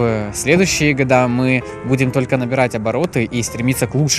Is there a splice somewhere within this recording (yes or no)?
no